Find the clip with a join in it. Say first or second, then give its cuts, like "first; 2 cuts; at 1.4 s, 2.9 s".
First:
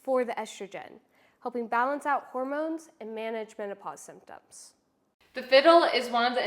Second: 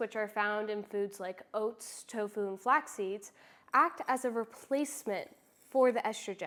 first; 1 cut; at 5.0 s